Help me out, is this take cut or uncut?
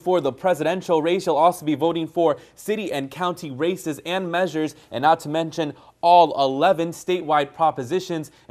uncut